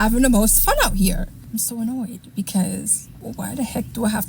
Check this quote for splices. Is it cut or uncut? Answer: uncut